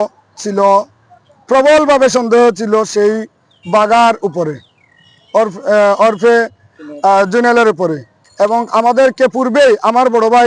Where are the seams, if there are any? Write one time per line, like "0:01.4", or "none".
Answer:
0:08.2